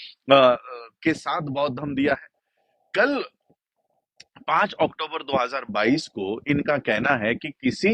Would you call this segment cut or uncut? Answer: uncut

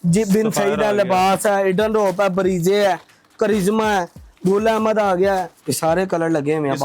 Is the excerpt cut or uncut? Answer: cut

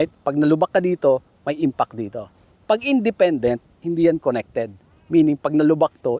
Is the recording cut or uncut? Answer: uncut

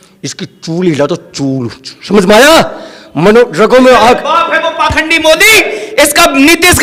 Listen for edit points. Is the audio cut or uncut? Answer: uncut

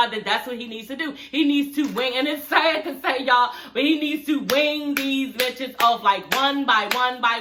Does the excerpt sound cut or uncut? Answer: uncut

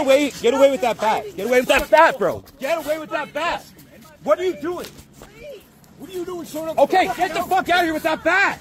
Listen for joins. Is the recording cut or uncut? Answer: uncut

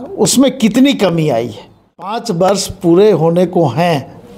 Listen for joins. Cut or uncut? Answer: cut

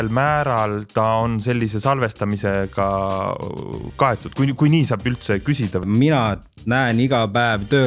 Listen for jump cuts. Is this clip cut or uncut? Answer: cut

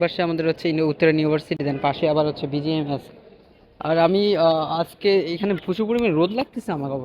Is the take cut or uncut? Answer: uncut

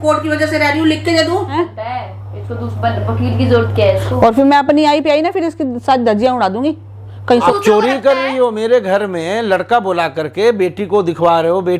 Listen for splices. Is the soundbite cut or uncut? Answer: cut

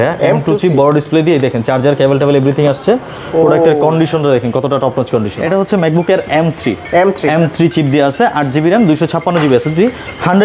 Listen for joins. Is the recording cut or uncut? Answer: cut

